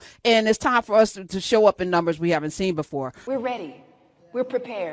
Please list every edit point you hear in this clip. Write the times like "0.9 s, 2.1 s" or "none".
3.3 s